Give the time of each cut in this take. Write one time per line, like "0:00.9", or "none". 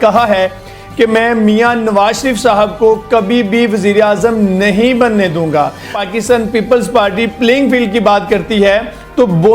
0:06.0